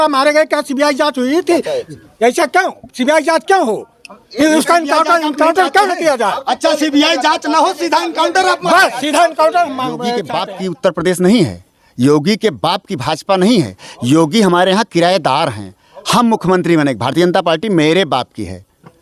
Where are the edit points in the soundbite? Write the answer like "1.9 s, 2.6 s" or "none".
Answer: 10.2 s